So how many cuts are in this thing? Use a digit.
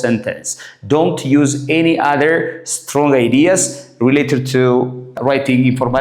0